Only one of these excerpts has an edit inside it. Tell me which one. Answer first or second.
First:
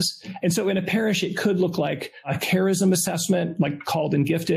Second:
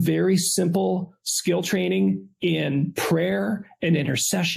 first